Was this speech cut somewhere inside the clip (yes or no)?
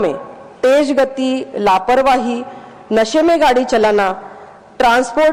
no